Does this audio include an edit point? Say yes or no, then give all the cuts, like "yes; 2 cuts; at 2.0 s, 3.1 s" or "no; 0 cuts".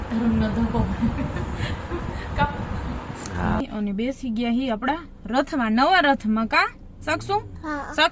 yes; 1 cut; at 3.6 s